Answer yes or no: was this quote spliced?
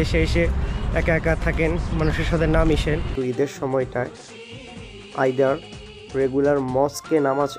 yes